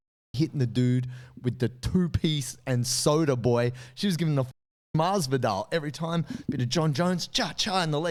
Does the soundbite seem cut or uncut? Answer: uncut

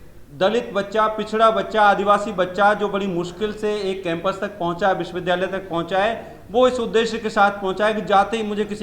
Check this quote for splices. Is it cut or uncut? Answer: uncut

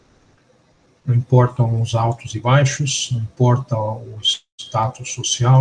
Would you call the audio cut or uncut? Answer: uncut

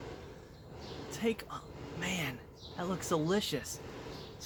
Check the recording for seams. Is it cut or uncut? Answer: uncut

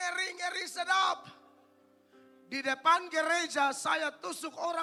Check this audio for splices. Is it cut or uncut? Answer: uncut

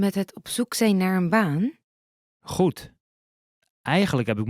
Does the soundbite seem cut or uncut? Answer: uncut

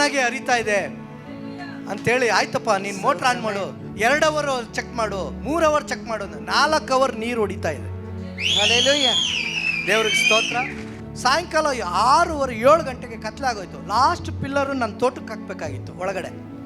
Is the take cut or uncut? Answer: cut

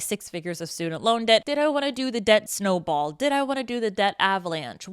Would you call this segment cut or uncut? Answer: cut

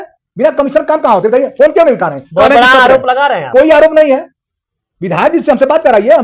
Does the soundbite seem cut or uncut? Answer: uncut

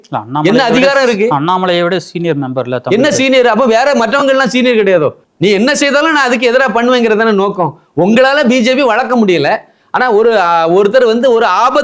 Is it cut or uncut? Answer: cut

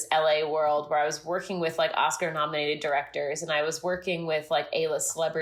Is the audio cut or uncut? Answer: uncut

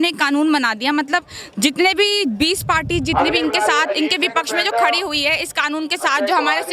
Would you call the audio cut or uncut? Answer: uncut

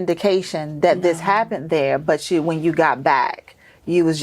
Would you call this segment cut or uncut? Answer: uncut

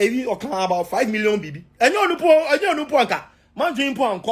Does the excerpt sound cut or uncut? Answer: uncut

